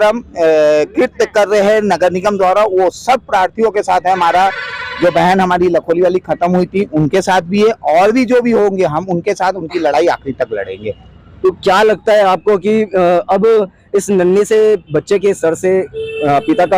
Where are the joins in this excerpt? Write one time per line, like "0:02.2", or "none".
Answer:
none